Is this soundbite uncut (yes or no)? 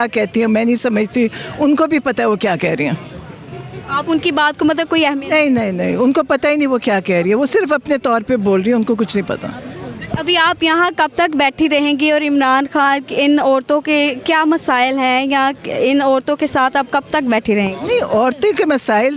yes